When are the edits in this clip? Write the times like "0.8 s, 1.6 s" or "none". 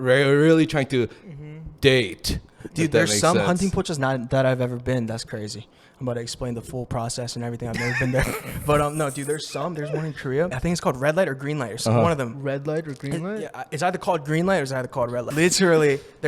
10.6 s, 15.3 s